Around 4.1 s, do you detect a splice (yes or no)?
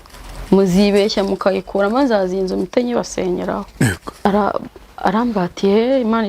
yes